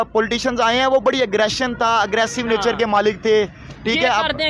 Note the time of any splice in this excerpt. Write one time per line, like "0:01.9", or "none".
none